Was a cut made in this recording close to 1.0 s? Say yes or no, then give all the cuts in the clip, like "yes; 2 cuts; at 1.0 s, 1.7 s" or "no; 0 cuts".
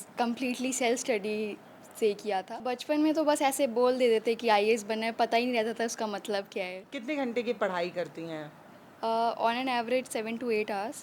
no; 2 cuts; at 2.6 s, 6.9 s